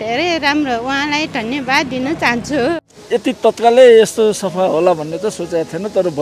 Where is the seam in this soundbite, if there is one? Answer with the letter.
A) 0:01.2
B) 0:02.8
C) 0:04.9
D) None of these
B